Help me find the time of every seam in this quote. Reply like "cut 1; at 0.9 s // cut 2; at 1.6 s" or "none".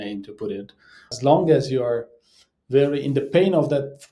cut 1; at 1.1 s

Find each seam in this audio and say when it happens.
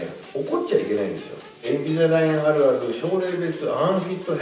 cut 1; at 1.7 s

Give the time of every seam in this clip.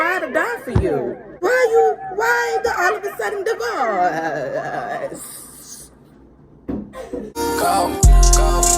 cut 1; at 1.2 s // cut 2; at 7.3 s

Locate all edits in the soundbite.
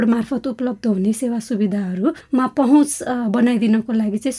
cut 1; at 2.2 s

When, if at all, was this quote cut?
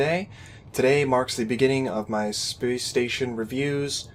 none

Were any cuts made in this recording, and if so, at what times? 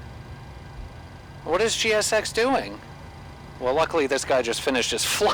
cut 1; at 1.1 s // cut 2; at 3.5 s

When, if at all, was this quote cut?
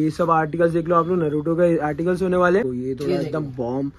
cut 1; at 2.7 s

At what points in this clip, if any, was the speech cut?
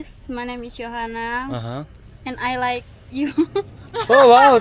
none

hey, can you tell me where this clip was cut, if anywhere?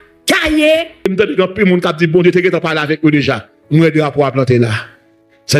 cut 1; at 1.1 s

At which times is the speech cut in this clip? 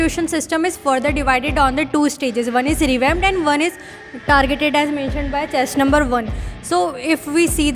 none

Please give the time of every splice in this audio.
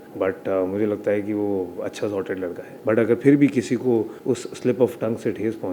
cut 1; at 2.7 s // cut 2; at 4.1 s

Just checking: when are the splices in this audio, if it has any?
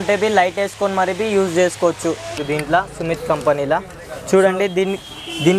cut 1; at 2.3 s

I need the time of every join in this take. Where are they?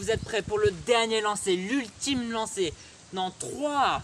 none

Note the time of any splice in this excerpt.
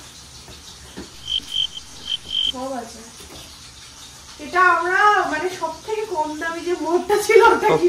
none

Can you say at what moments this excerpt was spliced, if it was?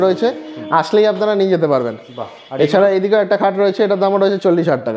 none

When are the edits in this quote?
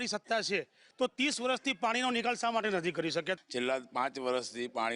cut 1; at 3.4 s

